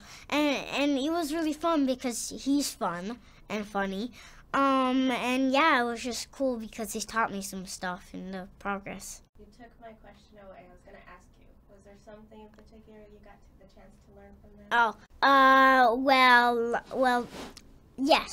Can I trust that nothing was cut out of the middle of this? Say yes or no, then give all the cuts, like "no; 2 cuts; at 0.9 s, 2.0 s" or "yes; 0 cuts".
no; 2 cuts; at 9.2 s, 15.0 s